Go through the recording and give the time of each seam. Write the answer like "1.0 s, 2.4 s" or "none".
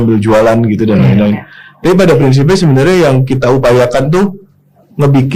none